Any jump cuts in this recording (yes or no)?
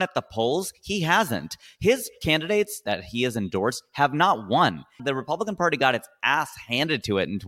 yes